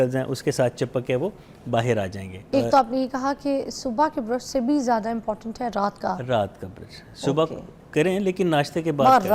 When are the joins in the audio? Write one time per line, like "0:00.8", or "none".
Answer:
0:02.5